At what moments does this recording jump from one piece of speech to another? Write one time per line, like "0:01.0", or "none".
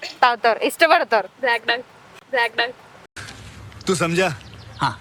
none